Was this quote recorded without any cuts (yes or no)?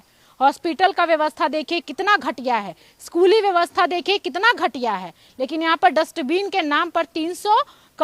yes